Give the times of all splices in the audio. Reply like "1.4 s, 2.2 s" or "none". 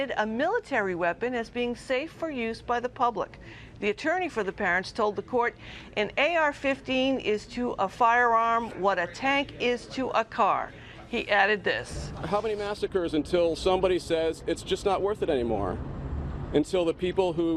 3.5 s